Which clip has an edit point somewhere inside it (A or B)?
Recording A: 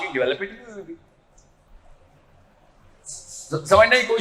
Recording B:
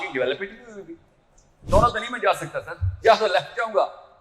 B